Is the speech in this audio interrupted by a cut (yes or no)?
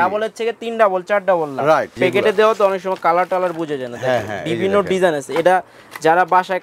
yes